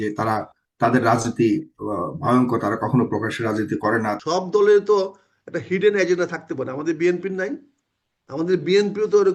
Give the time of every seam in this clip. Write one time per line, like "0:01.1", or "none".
0:04.2